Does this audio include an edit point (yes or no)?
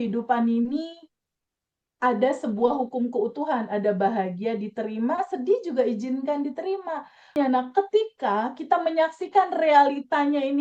yes